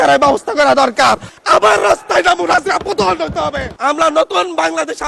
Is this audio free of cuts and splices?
no; 2 cuts; at 1.3 s, 3.7 s

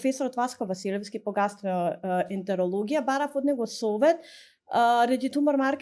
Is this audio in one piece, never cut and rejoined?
yes; 0 cuts

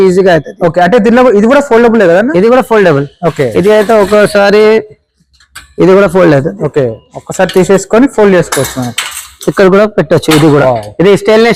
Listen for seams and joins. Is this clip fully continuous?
yes; 0 cuts

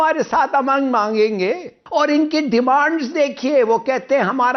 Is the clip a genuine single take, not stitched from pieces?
no; 1 cut; at 1.7 s

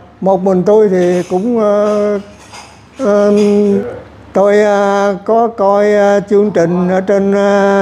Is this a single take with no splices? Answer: no; 1 cut; at 3.8 s

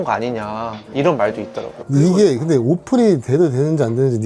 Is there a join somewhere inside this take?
no; 0 cuts

